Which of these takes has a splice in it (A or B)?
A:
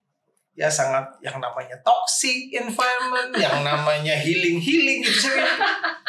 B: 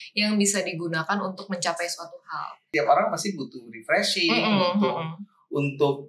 B